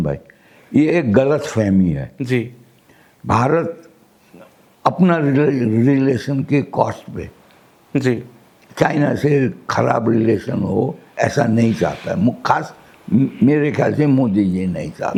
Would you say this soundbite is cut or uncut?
uncut